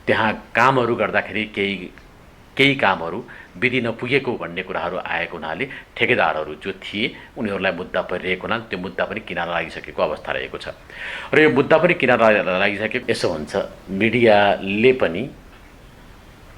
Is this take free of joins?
no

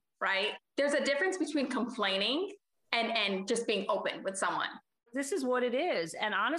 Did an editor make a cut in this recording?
yes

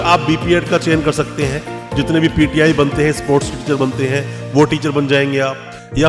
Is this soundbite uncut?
yes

